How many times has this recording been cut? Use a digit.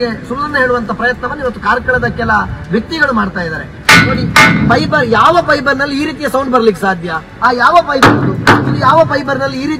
1